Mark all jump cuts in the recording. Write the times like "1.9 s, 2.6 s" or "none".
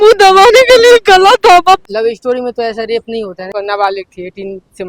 1.8 s, 3.4 s